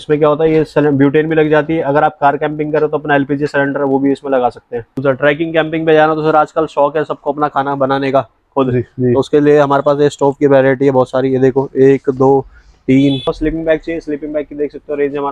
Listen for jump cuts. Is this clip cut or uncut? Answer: cut